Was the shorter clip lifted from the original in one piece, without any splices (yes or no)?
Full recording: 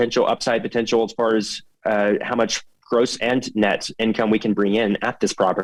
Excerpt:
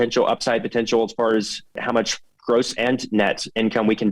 no